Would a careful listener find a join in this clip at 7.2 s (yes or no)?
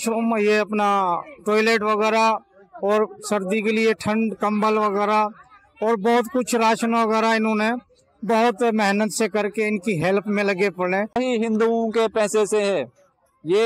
no